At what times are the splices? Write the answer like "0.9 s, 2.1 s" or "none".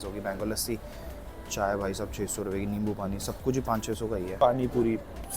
none